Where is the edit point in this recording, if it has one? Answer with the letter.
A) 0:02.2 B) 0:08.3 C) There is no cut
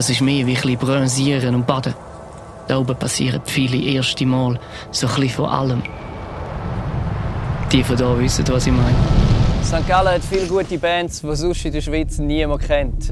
B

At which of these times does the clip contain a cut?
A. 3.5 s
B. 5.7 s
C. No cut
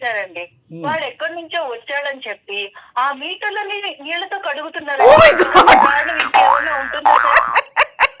C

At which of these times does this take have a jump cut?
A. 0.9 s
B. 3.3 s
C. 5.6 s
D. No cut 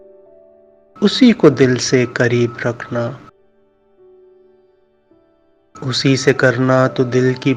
A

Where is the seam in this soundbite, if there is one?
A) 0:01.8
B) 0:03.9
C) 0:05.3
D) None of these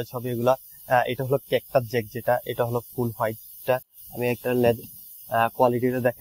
D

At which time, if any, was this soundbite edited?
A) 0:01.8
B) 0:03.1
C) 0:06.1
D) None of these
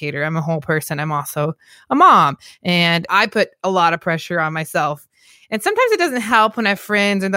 B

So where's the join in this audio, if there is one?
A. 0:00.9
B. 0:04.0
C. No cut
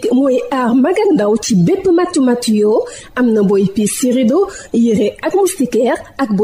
C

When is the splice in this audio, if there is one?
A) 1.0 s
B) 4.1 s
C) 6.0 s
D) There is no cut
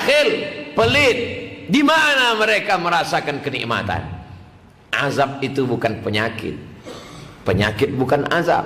D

